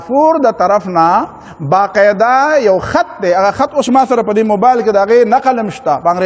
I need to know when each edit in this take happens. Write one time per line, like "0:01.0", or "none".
none